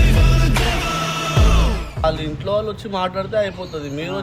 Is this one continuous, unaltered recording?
no; 1 cut; at 2.0 s

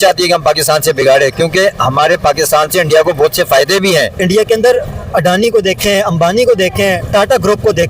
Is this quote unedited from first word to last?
no; 1 cut; at 4.1 s

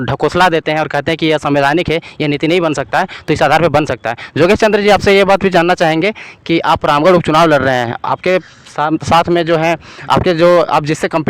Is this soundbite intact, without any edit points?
yes; 0 cuts

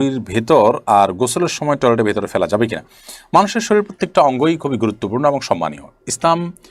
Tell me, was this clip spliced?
no; 0 cuts

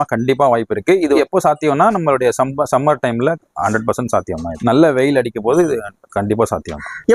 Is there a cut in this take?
no; 0 cuts

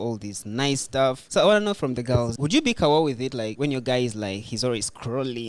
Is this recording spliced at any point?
yes; 3 cuts; at 1.2 s, 2.3 s, 3.5 s

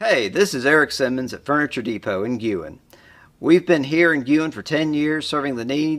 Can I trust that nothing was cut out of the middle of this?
yes; 0 cuts

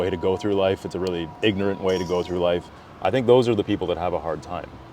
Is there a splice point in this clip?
yes; 2 cuts; at 1.3 s, 2.7 s

